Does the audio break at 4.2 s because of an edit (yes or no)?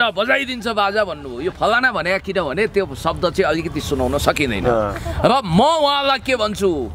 no